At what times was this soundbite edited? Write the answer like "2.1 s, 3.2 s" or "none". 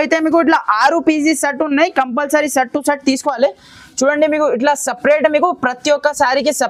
none